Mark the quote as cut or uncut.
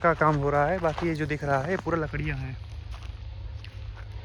uncut